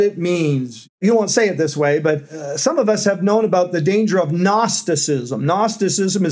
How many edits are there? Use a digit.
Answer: 2